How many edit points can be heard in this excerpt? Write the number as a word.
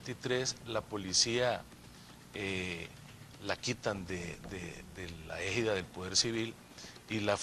zero